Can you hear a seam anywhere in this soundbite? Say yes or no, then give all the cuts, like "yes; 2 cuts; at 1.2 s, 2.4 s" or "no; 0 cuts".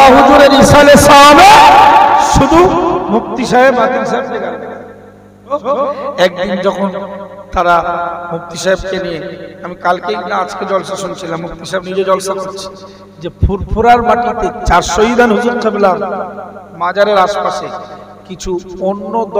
yes; 1 cut; at 5.5 s